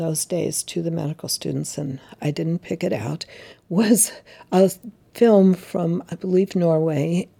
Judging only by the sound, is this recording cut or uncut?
uncut